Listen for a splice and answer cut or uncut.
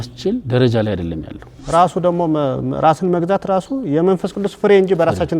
cut